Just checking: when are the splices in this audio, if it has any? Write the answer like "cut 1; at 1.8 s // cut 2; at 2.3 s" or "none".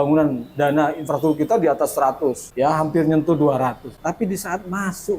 cut 1; at 2.4 s // cut 2; at 3.9 s